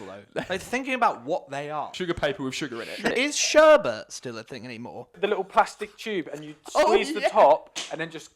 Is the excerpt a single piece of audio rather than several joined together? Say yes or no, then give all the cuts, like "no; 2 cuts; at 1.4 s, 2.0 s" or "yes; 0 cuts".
no; 3 cuts; at 1.9 s, 3.1 s, 5.2 s